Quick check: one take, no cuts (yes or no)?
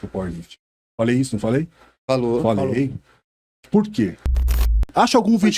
no